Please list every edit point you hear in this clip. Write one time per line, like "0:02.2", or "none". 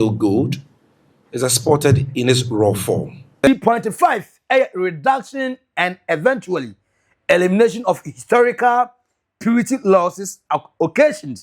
0:03.5